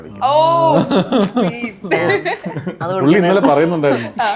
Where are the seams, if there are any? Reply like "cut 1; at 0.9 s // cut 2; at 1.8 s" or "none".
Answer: none

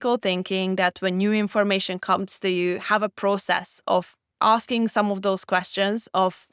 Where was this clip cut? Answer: cut 1; at 4.2 s

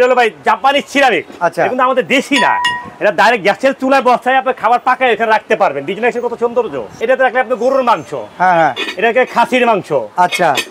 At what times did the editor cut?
cut 1; at 1.3 s // cut 2; at 7.0 s

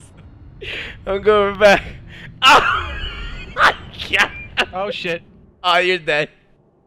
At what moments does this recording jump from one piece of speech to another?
none

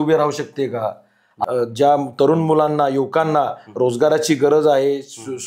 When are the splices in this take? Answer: cut 1; at 1.3 s

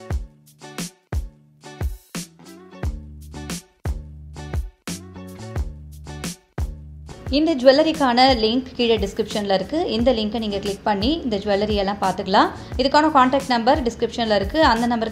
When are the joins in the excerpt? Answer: none

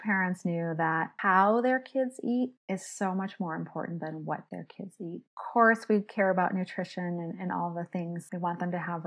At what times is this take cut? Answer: cut 1; at 1.1 s // cut 2; at 2.6 s // cut 3; at 5.4 s // cut 4; at 8.3 s

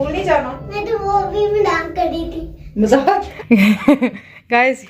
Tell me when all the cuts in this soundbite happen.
cut 1; at 3.3 s

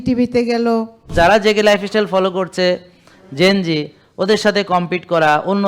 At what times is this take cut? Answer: cut 1; at 1.1 s

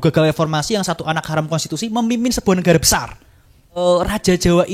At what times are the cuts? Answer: cut 1; at 3.8 s

